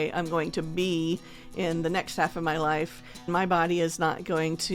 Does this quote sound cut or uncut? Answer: cut